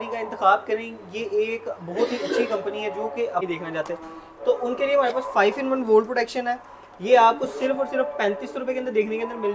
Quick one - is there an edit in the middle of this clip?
yes; 1 cut; at 3.4 s

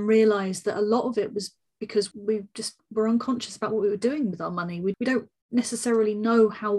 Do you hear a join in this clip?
yes; 2 cuts; at 2.1 s, 5.0 s

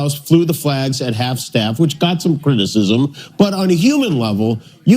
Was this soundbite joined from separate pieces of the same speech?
yes; 1 cut; at 1.0 s

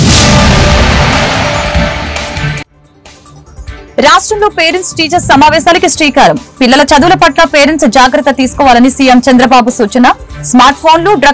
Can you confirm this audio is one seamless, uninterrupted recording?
no; 1 cut; at 3.9 s

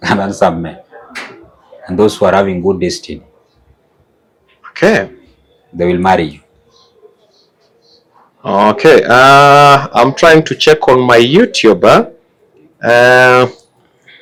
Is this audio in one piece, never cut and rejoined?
yes; 0 cuts

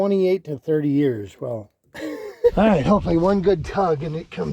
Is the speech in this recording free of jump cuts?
no; 1 cut; at 2.5 s

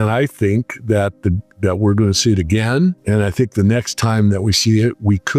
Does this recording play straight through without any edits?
no; 1 cut; at 3.0 s

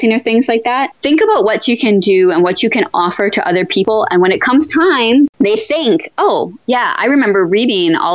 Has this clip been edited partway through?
yes; 2 cuts; at 3.8 s, 5.3 s

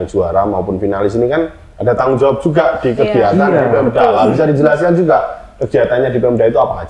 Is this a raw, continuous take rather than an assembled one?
yes; 0 cuts

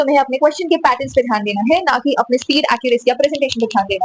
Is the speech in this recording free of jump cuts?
yes; 0 cuts

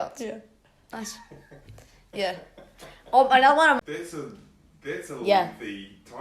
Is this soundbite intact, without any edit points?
no; 1 cut; at 3.8 s

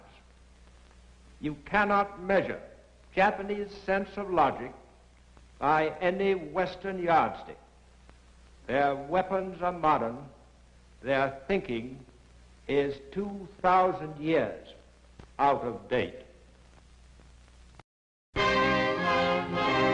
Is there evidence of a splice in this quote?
yes; 1 cut; at 12.6 s

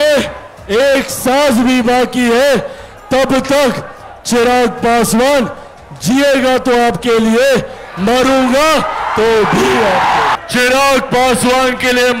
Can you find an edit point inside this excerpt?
yes; 1 cut; at 10.3 s

